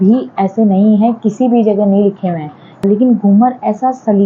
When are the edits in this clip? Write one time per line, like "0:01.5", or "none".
0:02.8